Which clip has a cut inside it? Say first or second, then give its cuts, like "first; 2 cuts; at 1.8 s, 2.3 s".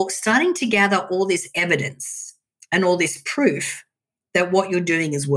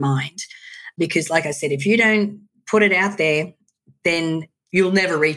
second; 2 cuts; at 0.9 s, 4.1 s